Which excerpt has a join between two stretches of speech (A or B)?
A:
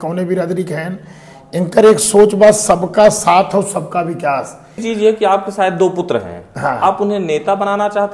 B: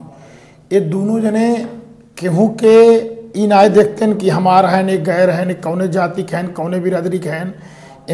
A